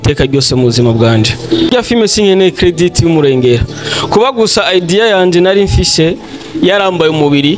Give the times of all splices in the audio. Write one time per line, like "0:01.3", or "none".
0:01.7